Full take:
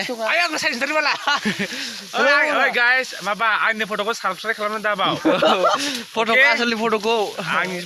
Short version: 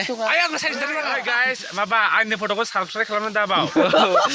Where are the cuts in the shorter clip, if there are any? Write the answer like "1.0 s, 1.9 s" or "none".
0.9 s